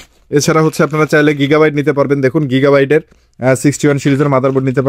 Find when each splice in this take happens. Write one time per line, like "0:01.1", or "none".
none